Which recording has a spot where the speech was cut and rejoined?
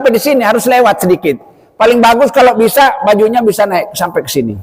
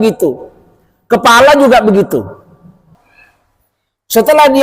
second; 1 cut; at 3.0 s

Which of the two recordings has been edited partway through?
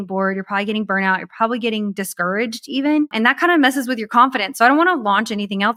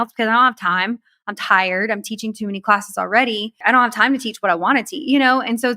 second; 1 cut; at 3.6 s

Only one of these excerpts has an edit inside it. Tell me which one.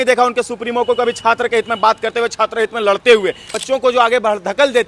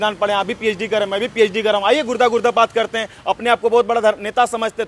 first; 1 cut; at 3.5 s

